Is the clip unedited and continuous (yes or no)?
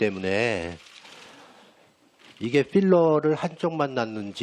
no